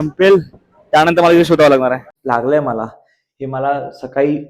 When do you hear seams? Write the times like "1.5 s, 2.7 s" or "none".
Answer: 2.1 s